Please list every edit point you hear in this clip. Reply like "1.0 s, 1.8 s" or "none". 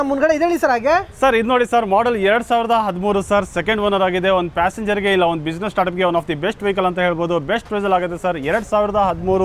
none